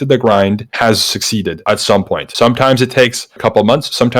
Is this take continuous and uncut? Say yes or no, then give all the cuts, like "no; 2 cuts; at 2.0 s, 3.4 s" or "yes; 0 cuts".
yes; 0 cuts